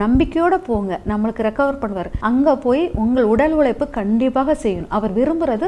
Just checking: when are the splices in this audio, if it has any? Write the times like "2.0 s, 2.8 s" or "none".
2.1 s